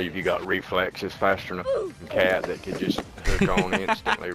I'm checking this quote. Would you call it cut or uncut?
uncut